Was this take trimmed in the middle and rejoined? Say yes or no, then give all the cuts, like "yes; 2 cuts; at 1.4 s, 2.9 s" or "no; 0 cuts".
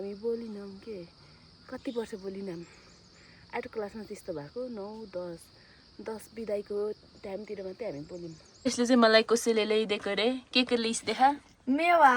yes; 1 cut; at 8.6 s